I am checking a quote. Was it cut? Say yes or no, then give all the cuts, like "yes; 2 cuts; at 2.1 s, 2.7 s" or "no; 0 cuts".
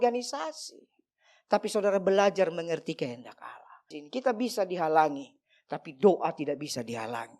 yes; 1 cut; at 3.9 s